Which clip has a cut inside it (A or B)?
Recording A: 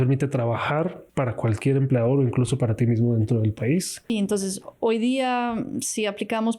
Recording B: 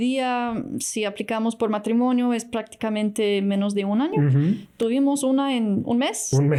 A